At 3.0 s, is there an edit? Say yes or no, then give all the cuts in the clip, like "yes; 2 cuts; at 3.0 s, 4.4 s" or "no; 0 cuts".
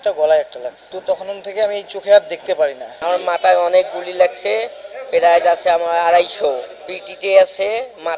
yes; 1 cut; at 3.0 s